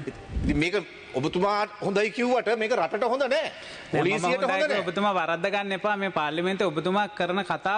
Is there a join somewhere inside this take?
no; 0 cuts

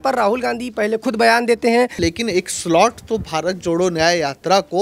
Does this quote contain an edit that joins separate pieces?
yes; 1 cut; at 2.0 s

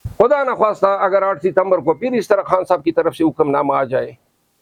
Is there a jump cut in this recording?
no; 0 cuts

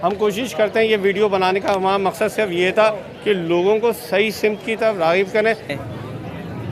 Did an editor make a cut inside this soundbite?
yes; 1 cut; at 5.8 s

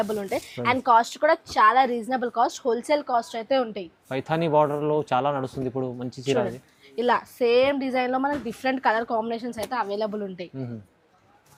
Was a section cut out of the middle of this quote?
no; 0 cuts

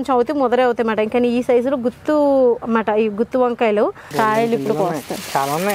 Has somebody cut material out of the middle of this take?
yes; 1 cut; at 4.0 s

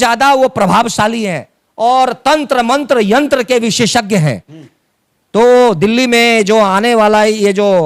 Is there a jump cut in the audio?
no; 0 cuts

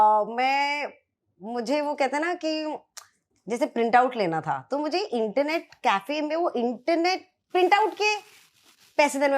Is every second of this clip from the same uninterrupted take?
yes; 0 cuts

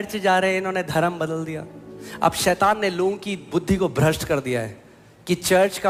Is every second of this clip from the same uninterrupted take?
yes; 0 cuts

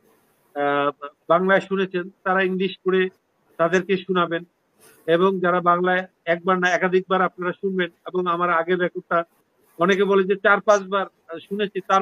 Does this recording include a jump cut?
no; 0 cuts

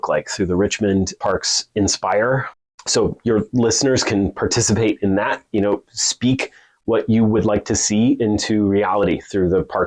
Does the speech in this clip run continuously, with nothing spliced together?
no; 2 cuts; at 1.2 s, 2.6 s

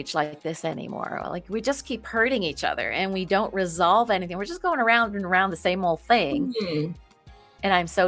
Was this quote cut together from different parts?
no; 0 cuts

